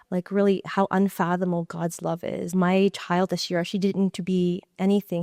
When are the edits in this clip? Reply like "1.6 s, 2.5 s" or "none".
2.5 s